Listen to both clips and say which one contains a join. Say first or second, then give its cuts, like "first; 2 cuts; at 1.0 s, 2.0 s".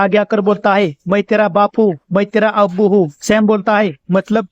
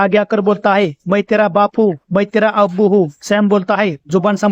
first; 1 cut; at 3.2 s